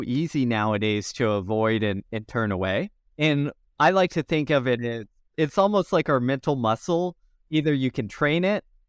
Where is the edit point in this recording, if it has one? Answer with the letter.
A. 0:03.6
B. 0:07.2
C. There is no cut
A